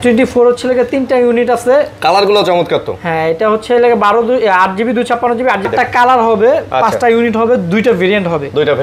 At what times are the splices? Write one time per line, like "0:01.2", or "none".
0:05.7